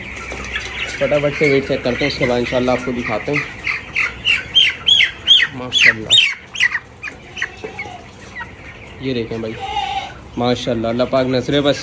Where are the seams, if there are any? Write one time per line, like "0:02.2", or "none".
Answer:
none

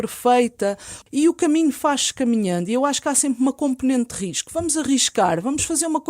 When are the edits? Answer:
0:00.9

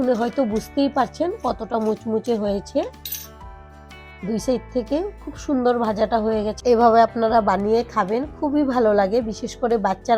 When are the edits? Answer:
0:06.6

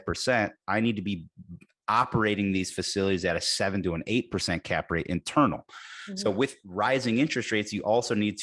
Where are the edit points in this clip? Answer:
none

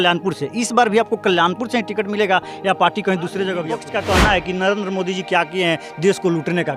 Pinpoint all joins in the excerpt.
0:03.8

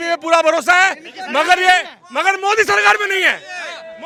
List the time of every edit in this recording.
none

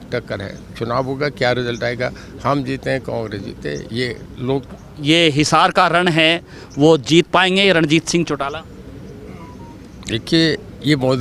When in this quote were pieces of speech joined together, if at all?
0:04.7

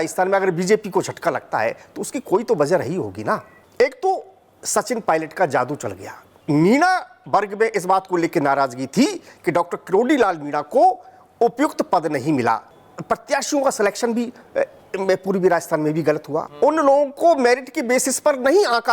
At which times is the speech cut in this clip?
0:03.6
0:06.3
0:12.7
0:16.4

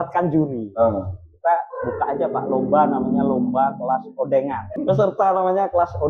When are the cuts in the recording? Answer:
0:04.8

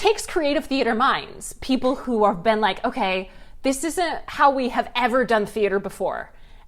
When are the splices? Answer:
none

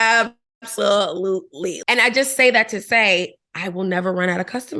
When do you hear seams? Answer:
0:01.8

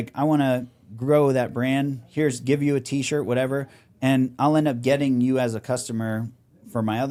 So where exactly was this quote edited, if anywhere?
none

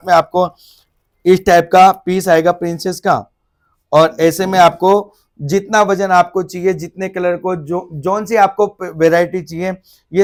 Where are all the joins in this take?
none

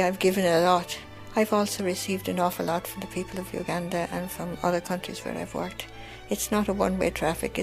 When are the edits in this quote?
none

